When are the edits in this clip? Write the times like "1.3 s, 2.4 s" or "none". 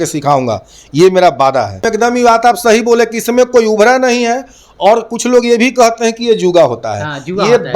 1.8 s